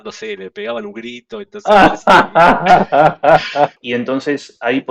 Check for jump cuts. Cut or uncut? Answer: cut